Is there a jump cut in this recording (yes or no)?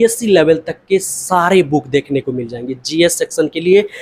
no